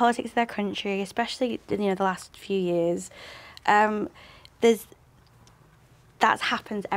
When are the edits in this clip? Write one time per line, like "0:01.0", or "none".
none